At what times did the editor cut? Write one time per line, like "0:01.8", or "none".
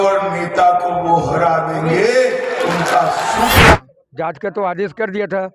0:03.8

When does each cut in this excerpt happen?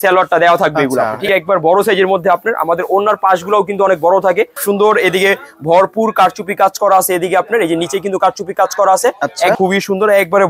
0:01.3
0:04.6
0:09.6

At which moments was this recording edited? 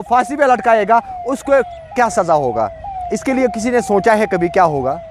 none

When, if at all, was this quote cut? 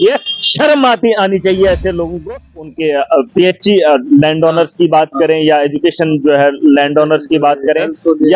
0:02.5

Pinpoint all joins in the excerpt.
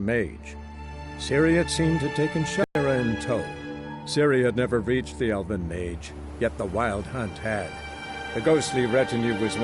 0:02.6

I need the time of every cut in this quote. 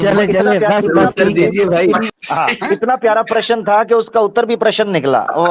0:02.1

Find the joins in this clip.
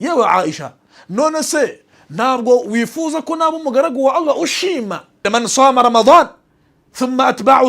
0:05.2

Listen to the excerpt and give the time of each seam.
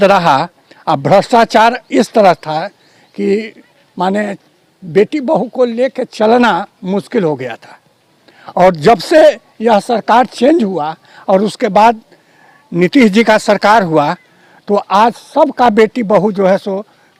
none

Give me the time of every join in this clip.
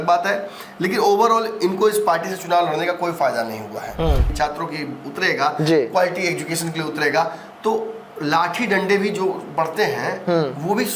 0:04.2

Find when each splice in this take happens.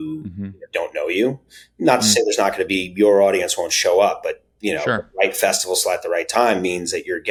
none

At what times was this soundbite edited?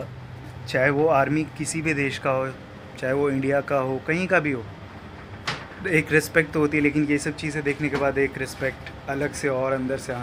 none

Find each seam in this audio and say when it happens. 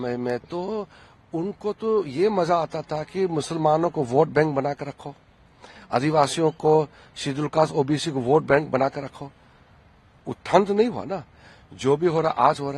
none

